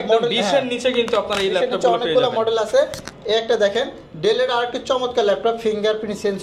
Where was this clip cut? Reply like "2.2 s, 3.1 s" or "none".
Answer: none